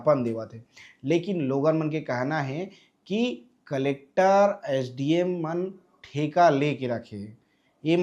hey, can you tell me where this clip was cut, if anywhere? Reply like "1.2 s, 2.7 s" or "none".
none